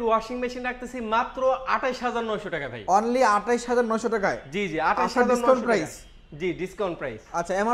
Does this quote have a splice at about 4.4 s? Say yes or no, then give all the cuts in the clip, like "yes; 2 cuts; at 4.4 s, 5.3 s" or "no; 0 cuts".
no; 0 cuts